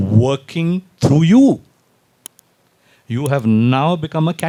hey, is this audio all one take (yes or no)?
yes